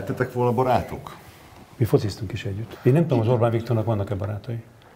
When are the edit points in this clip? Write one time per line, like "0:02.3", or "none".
0:02.6